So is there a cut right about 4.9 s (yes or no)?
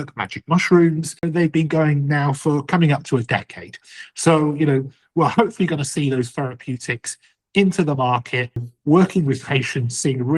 no